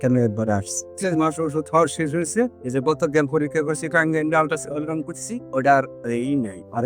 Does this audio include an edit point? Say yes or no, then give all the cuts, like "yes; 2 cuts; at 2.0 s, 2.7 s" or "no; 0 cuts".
yes; 1 cut; at 0.9 s